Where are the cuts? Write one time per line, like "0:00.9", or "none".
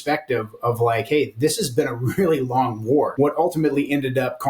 0:03.1